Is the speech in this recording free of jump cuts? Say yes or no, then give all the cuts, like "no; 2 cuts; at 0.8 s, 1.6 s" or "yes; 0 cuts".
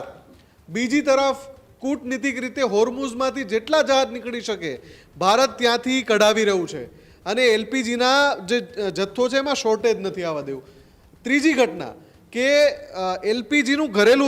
yes; 0 cuts